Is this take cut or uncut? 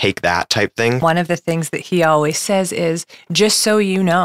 cut